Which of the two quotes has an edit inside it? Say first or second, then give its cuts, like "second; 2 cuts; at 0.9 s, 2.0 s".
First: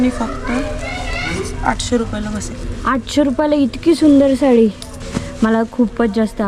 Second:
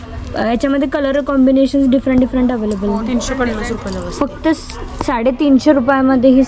second; 1 cut; at 3.1 s